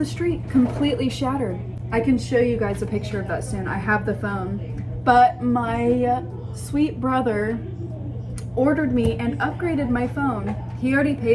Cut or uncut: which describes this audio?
uncut